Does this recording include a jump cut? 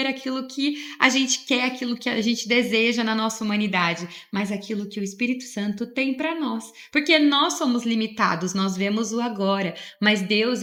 no; 0 cuts

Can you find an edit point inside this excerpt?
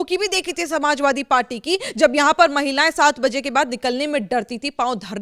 no; 0 cuts

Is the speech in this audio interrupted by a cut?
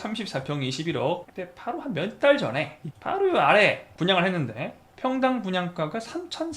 yes; 3 cuts; at 1.3 s, 2.8 s, 3.9 s

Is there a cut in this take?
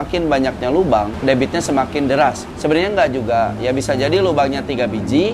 yes; 2 cuts; at 1.1 s, 2.5 s

